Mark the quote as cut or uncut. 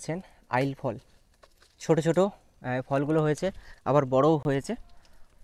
uncut